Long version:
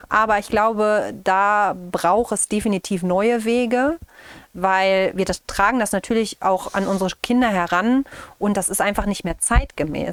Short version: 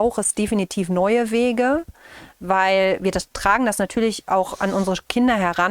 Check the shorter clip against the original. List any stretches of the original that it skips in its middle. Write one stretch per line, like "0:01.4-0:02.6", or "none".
none